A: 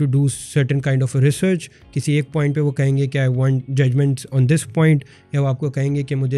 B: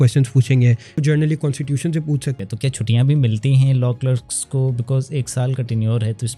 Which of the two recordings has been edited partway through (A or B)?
B